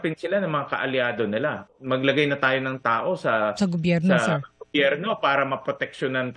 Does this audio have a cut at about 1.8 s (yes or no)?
yes